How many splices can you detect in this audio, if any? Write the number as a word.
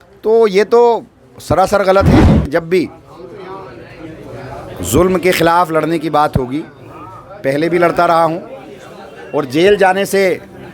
one